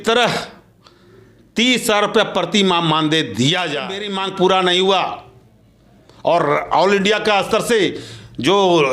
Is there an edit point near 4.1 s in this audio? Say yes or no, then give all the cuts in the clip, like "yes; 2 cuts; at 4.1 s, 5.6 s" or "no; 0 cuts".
yes; 1 cut; at 4.1 s